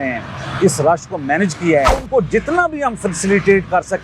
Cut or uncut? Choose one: cut